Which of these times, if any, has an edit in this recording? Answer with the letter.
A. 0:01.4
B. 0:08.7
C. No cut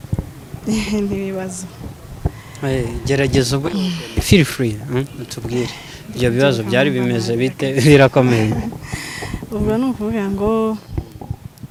C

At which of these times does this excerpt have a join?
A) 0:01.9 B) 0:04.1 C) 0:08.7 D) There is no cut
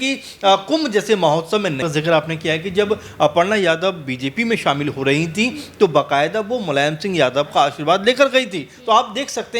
A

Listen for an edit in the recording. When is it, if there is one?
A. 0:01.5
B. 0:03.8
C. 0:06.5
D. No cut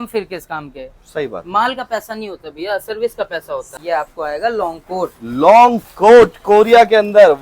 B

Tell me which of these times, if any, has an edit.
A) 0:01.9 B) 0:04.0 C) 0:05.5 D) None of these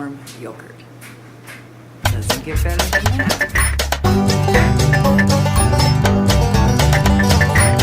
A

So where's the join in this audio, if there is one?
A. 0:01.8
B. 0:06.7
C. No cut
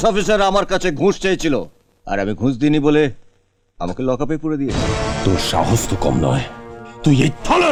C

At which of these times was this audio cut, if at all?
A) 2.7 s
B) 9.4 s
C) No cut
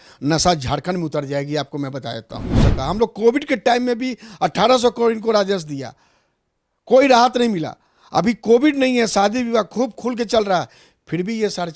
A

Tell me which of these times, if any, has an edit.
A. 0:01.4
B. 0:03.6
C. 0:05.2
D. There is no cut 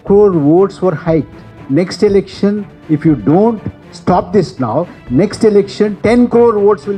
D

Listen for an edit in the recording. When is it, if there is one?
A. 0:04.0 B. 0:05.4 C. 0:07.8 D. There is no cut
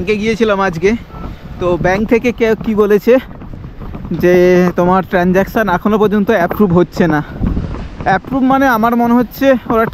D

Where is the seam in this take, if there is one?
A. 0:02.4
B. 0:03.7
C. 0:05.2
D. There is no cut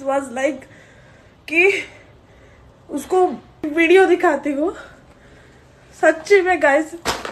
B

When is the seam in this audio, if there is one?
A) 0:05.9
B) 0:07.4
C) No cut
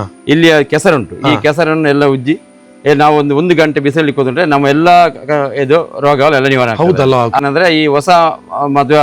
B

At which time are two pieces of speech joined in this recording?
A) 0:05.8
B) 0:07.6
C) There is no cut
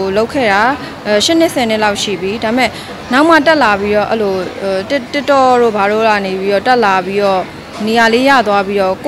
C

